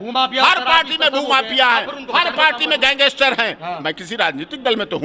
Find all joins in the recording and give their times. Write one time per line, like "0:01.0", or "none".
none